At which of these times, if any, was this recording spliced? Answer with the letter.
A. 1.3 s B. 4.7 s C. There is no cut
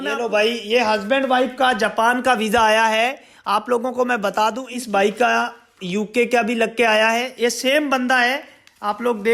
B